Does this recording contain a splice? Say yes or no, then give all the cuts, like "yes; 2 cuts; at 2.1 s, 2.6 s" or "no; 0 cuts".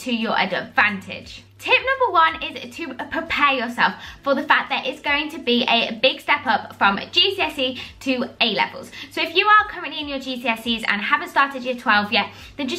no; 0 cuts